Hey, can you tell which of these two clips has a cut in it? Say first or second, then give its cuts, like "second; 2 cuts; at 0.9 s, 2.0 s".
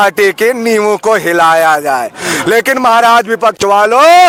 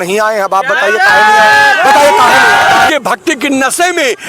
second; 1 cut; at 2.9 s